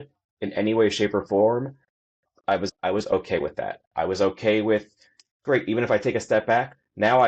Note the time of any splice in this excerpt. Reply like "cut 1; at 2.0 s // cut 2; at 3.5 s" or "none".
cut 1; at 2.5 s